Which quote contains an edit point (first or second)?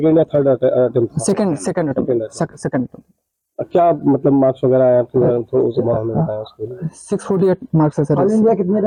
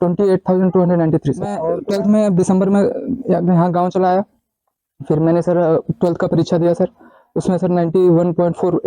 second